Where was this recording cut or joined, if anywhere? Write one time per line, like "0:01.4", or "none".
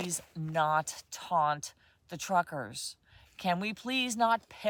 none